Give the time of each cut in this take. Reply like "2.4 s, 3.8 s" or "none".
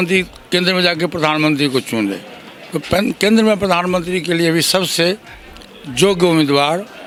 none

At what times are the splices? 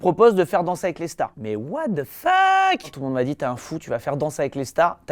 1.4 s

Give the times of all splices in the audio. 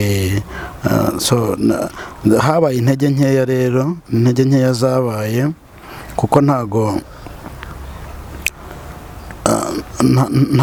none

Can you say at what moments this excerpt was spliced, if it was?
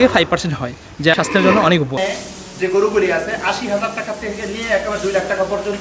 2.0 s

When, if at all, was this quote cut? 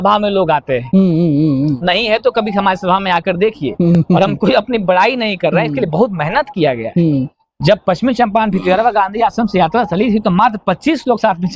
none

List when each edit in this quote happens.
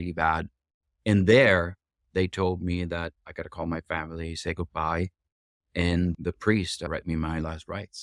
3.2 s

